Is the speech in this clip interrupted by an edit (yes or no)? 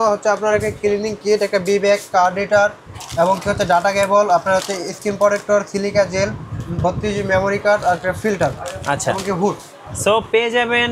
no